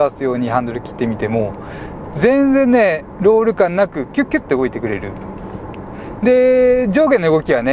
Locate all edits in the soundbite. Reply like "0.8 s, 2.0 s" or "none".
none